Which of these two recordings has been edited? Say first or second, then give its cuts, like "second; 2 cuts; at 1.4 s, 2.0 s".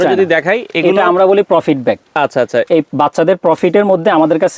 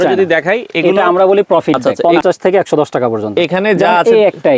second; 1 cut; at 2.0 s